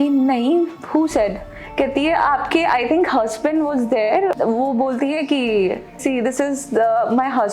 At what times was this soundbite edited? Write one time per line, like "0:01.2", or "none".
0:04.4
0:06.0